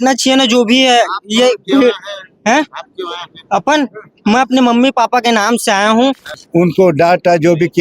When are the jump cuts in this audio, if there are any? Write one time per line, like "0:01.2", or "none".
0:06.3